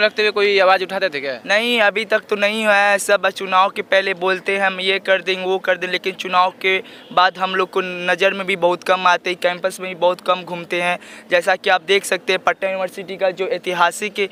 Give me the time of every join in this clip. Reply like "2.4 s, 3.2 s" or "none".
none